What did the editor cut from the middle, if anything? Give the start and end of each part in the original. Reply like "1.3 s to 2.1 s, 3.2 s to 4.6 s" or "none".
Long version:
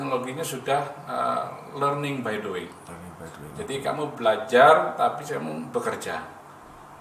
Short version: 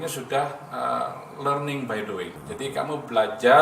2.8 s to 3.5 s

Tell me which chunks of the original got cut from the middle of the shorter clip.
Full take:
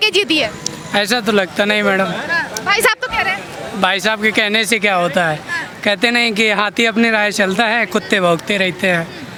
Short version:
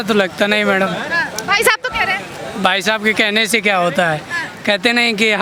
none

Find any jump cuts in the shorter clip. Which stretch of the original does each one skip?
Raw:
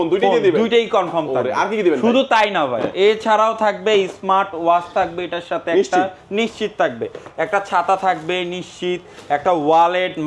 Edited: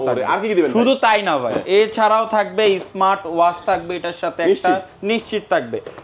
none

